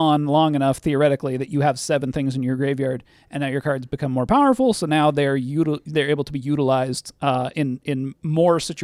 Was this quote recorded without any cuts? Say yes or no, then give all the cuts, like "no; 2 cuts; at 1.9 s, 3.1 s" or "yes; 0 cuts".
yes; 0 cuts